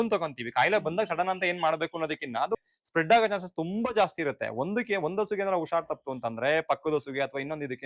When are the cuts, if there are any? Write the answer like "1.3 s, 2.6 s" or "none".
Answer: 2.6 s